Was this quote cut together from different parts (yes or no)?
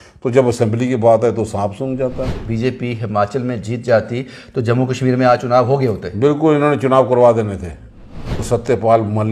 yes